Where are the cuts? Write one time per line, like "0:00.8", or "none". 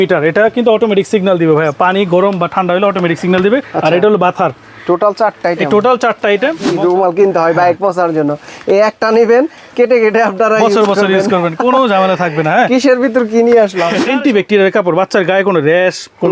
0:06.7
0:14.0